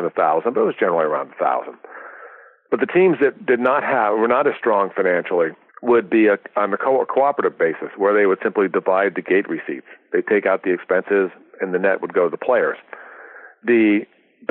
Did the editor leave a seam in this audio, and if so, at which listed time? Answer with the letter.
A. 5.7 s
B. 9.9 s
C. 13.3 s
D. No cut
A